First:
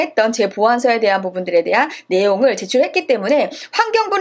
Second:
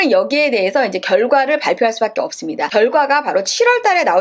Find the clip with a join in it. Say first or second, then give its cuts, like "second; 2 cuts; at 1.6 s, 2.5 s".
second; 1 cut; at 2.6 s